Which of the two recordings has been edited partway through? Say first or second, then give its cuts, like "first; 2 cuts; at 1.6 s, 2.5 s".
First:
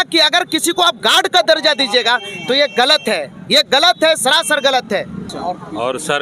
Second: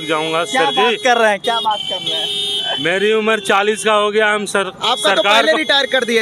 first; 1 cut; at 5.1 s